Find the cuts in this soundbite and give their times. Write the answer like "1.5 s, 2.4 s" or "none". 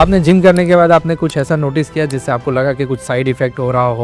none